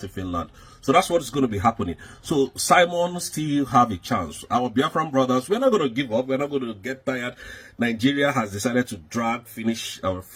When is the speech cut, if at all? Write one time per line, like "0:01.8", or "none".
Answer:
none